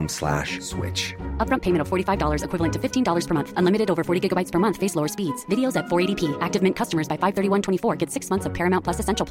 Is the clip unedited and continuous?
yes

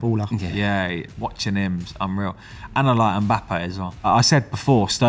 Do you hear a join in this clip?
yes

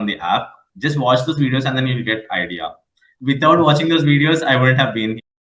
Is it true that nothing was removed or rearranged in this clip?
no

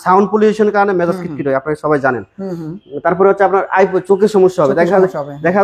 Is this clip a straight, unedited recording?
yes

